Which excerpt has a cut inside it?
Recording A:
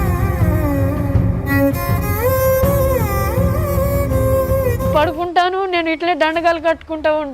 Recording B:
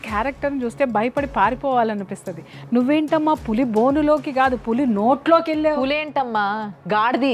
A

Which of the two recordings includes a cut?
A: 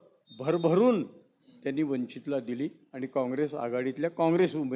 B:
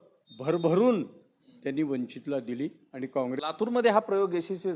B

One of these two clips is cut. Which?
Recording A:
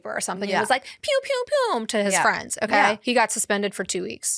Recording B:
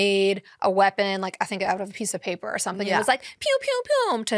A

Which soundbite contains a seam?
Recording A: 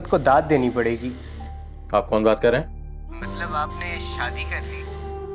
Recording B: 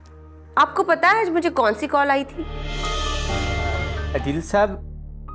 B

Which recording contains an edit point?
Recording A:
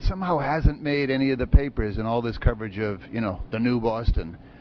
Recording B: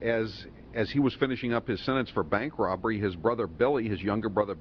B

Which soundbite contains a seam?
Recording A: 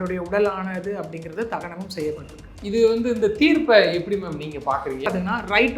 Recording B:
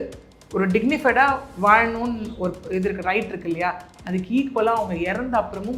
A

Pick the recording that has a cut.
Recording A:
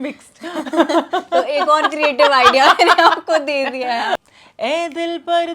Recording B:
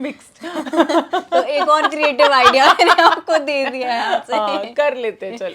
A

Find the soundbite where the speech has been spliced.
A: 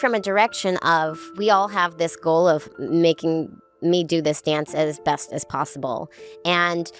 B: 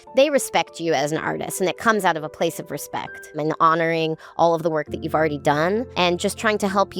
B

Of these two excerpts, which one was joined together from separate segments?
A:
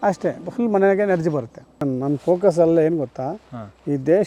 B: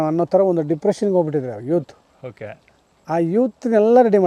A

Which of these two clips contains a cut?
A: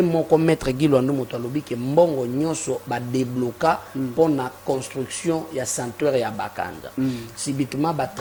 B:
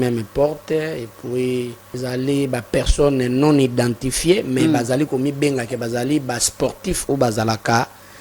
B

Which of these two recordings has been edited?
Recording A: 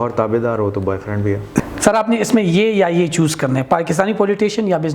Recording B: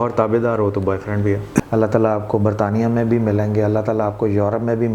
B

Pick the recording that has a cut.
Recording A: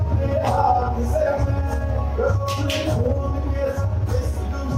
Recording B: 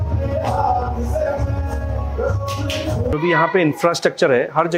B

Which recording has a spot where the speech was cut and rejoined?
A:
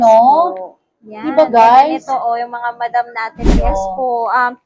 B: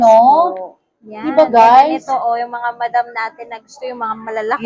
A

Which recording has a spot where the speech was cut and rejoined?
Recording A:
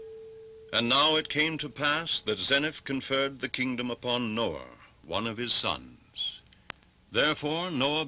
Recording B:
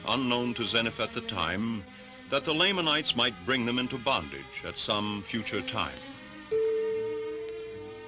B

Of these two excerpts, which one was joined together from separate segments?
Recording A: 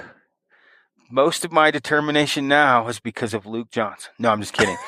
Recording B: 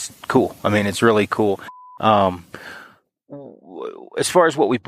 B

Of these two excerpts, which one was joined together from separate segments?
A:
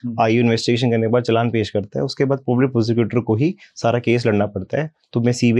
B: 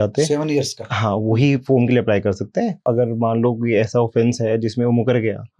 B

